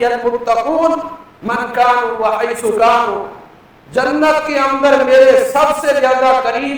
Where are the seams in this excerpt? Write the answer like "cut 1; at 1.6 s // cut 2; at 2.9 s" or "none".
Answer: none